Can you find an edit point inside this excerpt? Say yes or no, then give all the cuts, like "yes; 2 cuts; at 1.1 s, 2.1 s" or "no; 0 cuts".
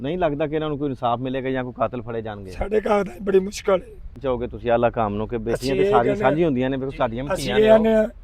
no; 0 cuts